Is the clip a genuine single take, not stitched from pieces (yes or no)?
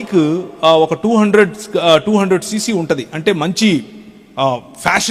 yes